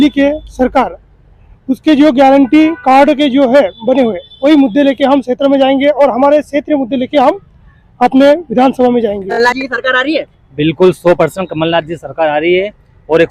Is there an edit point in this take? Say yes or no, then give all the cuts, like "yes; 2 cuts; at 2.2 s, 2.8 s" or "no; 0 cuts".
yes; 1 cut; at 9.6 s